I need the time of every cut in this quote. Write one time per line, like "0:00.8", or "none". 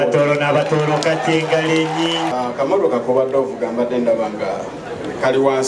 0:02.3